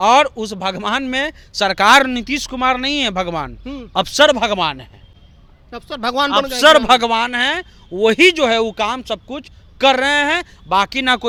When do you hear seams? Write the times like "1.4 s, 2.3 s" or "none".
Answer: none